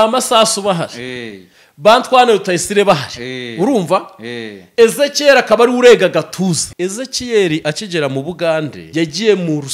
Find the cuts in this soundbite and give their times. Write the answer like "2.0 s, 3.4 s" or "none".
6.7 s, 8.8 s